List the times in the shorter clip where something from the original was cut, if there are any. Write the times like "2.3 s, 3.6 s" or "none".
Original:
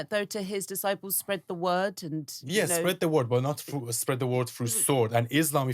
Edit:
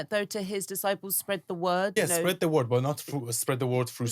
1.9 s